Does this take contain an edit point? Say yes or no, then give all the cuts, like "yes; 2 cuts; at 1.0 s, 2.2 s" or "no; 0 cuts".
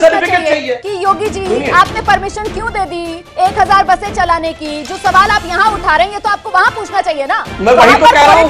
no; 0 cuts